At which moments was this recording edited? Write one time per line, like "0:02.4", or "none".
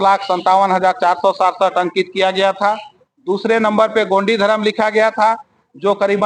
none